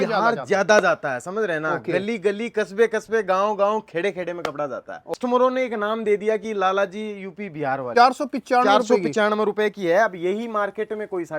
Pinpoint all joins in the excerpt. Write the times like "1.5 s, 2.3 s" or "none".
5.1 s, 7.9 s